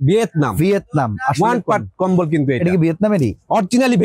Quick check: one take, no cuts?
yes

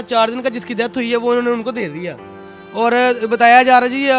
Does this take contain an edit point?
no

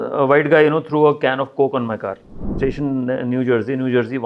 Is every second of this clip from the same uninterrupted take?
no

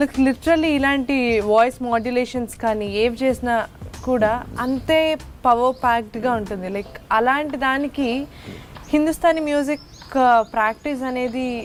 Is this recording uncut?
yes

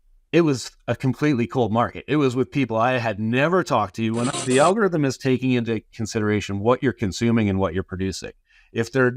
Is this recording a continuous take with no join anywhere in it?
no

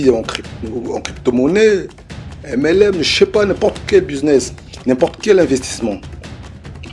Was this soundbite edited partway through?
no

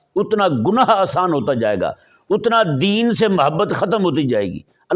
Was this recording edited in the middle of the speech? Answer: no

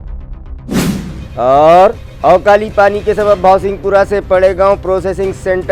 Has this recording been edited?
no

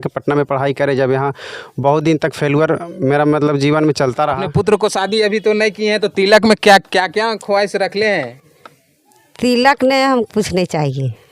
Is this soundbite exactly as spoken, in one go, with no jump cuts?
no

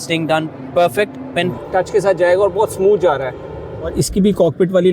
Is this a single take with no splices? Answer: no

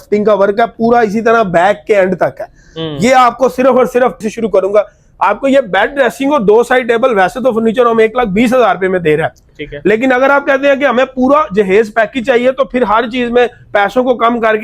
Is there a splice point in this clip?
yes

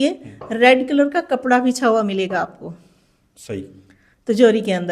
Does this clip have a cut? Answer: no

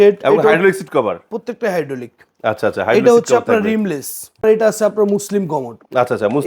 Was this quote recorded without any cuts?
no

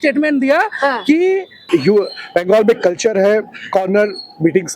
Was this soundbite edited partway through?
yes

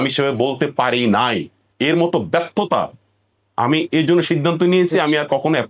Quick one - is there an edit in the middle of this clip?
no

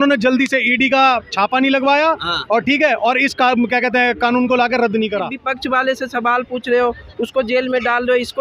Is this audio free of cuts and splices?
no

